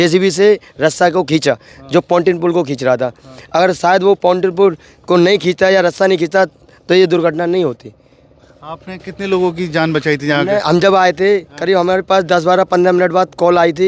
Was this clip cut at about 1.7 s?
no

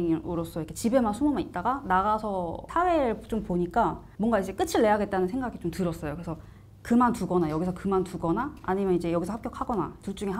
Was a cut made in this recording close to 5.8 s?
no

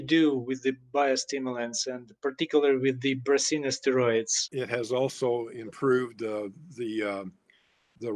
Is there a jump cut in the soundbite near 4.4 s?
yes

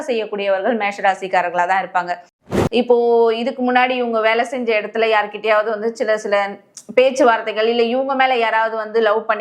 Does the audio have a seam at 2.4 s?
yes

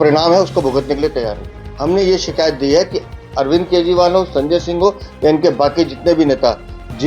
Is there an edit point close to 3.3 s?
no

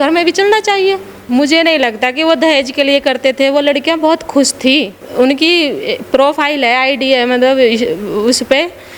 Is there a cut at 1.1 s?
yes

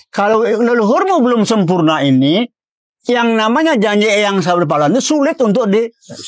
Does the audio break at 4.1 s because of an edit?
no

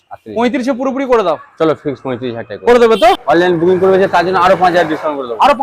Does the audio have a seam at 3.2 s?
yes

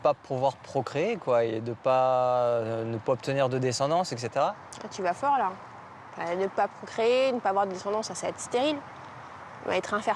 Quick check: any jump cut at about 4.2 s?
no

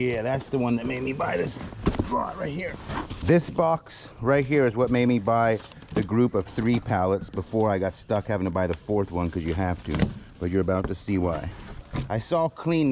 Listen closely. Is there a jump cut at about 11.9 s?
yes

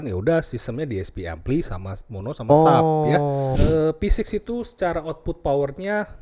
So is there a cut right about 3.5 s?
yes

